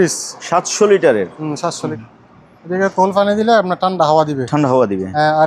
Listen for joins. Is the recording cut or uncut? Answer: cut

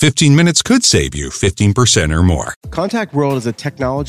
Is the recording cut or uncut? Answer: cut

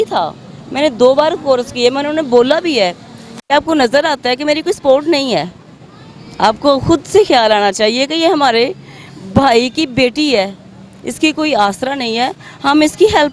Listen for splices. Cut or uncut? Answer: uncut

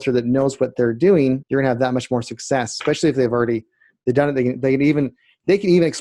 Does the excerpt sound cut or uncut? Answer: cut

